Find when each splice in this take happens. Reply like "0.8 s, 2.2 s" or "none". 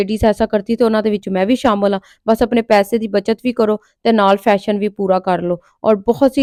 none